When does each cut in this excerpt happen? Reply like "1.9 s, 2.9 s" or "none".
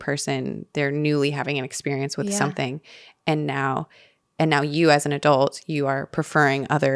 none